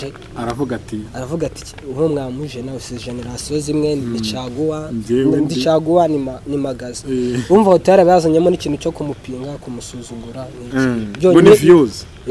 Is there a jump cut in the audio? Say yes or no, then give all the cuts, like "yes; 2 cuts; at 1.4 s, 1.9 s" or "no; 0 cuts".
no; 0 cuts